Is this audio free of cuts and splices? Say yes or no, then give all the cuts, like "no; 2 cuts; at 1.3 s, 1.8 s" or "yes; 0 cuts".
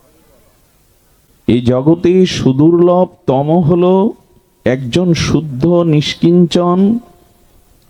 no; 1 cut; at 1.3 s